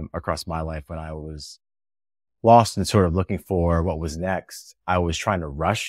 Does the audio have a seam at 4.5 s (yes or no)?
no